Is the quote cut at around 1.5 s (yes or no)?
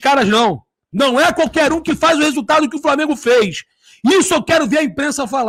no